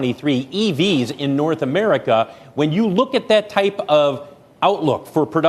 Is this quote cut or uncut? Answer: uncut